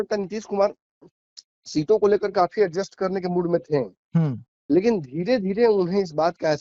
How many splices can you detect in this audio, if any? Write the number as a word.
zero